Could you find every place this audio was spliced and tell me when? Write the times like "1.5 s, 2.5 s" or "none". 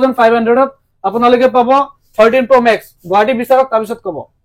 none